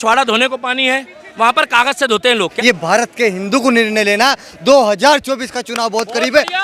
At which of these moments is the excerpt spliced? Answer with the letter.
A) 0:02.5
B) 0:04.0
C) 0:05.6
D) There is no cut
A